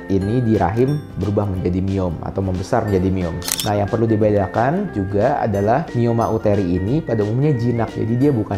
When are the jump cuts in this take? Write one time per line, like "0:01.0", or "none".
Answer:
0:03.5